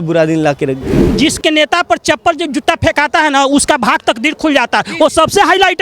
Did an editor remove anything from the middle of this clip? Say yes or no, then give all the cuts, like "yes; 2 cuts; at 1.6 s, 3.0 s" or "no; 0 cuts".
yes; 1 cut; at 1.1 s